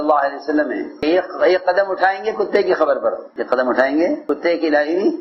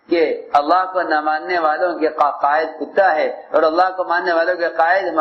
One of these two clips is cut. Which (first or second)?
first